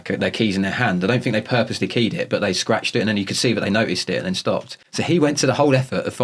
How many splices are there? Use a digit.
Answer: 1